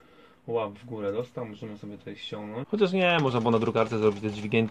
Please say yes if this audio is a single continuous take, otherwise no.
no